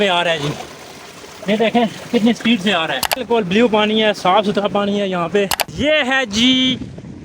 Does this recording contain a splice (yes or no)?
yes